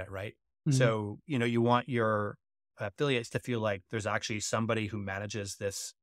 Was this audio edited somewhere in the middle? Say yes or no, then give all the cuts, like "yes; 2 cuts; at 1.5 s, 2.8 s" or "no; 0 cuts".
no; 0 cuts